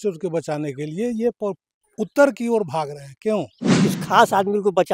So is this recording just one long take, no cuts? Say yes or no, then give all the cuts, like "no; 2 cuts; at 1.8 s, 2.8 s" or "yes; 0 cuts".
no; 1 cut; at 3.6 s